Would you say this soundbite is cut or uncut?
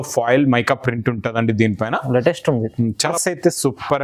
cut